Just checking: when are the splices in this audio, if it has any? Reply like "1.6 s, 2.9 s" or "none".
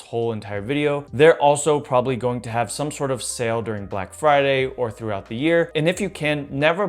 1.1 s